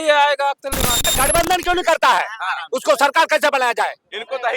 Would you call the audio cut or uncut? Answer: cut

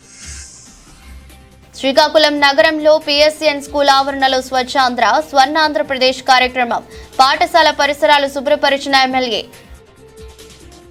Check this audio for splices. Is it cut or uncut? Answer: uncut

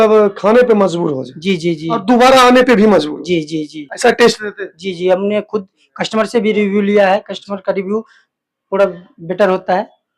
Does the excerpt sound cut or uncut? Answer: uncut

